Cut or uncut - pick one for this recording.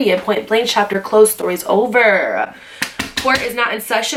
uncut